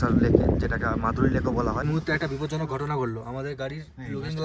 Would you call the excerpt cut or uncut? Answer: cut